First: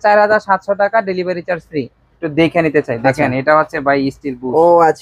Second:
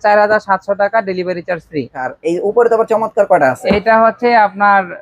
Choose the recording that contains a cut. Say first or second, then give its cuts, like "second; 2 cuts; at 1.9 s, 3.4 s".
first; 1 cut; at 2.0 s